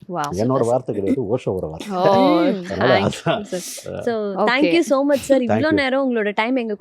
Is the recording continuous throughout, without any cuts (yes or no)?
yes